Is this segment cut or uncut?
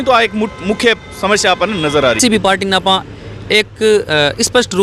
cut